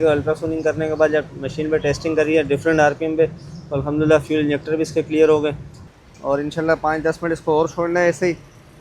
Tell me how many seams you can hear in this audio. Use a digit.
1